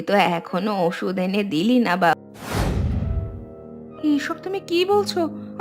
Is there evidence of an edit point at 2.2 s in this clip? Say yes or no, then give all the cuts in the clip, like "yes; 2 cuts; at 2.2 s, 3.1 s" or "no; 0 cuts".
yes; 1 cut; at 2.2 s